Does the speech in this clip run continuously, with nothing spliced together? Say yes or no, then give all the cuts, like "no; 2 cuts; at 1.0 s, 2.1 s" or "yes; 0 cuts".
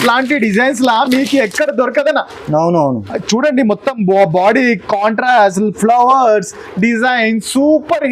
yes; 0 cuts